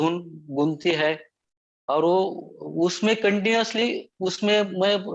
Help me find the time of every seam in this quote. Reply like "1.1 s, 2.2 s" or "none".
none